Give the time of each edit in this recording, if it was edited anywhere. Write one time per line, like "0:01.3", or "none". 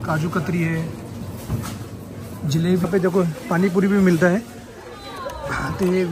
0:02.8